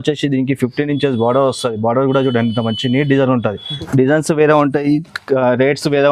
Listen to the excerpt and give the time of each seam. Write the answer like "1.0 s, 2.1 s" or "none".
3.8 s